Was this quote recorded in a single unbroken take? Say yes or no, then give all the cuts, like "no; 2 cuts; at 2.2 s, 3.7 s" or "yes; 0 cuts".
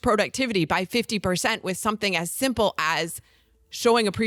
yes; 0 cuts